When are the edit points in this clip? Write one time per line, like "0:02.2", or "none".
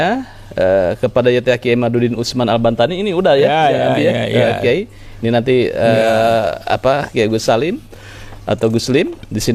none